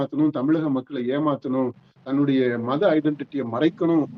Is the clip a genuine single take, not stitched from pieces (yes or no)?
yes